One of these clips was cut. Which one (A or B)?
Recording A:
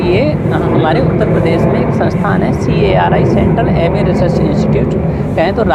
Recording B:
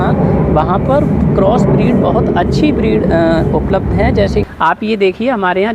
B